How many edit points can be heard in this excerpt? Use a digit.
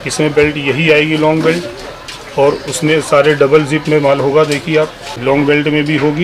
1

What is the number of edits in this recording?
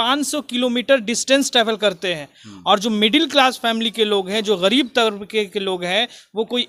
0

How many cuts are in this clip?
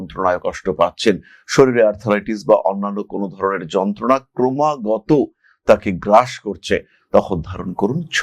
0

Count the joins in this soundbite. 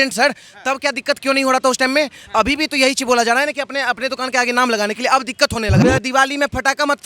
1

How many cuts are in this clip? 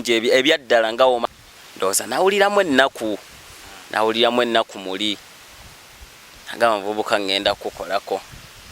1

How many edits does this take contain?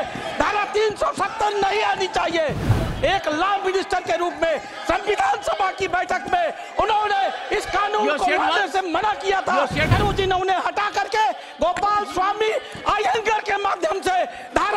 2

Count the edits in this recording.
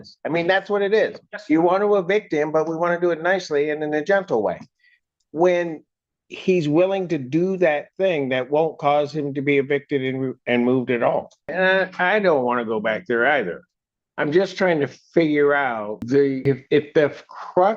2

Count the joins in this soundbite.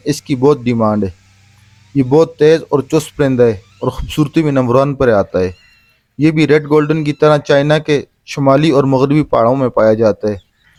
0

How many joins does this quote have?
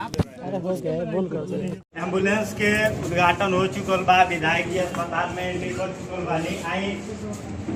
0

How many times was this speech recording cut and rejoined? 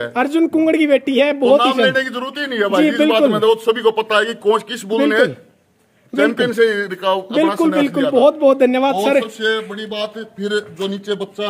0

